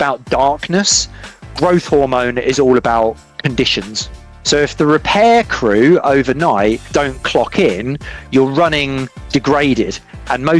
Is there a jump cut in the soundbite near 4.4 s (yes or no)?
yes